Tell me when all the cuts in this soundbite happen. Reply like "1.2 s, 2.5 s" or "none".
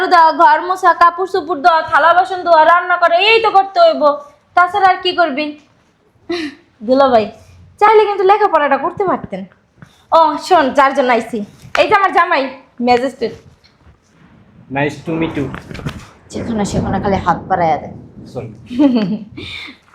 none